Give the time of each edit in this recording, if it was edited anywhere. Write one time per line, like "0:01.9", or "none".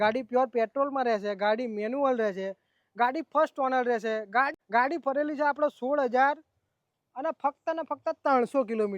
0:04.6